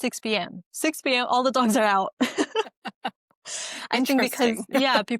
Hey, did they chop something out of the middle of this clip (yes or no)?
no